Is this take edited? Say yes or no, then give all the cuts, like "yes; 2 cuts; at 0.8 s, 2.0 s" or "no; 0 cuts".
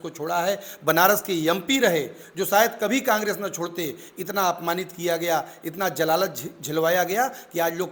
no; 0 cuts